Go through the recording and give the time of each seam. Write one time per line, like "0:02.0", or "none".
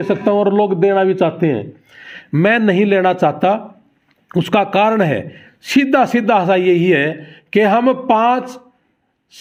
none

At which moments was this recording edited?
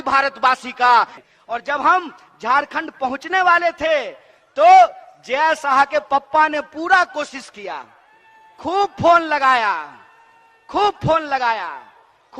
0:01.2

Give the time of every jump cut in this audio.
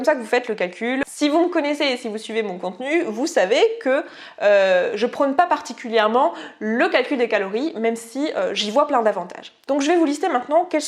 0:01.0

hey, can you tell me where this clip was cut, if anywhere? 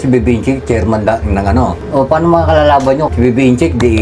0:01.8
0:03.1

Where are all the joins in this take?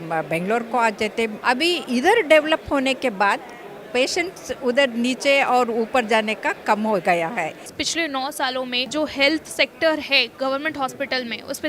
0:01.4
0:07.8
0:08.9

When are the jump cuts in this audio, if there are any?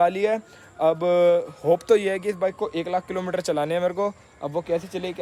none

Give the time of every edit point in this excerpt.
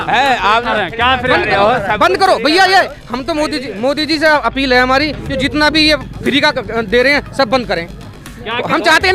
none

